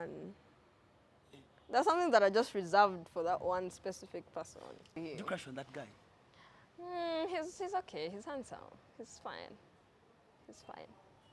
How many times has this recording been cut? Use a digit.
1